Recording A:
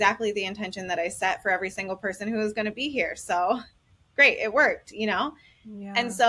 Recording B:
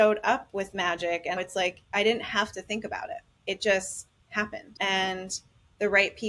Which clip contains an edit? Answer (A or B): B